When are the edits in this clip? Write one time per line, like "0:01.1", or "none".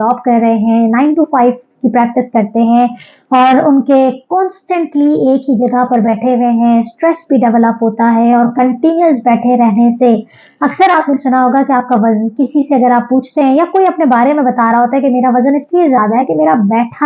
none